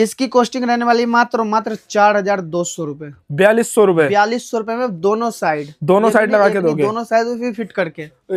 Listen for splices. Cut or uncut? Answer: uncut